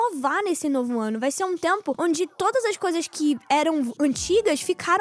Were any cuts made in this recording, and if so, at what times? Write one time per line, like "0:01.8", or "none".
0:02.0